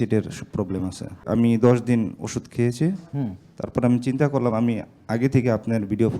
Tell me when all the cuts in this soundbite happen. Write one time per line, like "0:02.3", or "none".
0:01.2